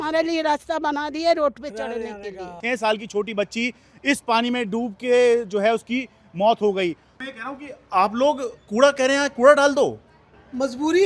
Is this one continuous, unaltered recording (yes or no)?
no